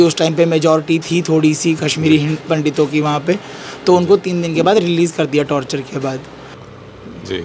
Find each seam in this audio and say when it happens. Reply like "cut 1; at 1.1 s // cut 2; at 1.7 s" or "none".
cut 1; at 6.5 s